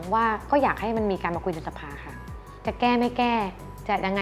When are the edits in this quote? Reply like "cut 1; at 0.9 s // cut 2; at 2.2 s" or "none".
cut 1; at 2.2 s